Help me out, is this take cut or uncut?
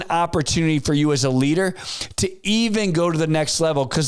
uncut